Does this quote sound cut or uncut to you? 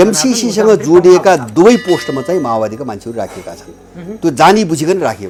uncut